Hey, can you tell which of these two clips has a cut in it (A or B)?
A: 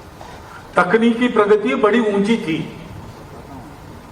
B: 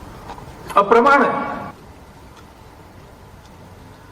A